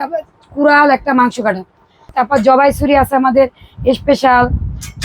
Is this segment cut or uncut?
cut